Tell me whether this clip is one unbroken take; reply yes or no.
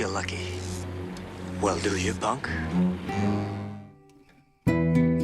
no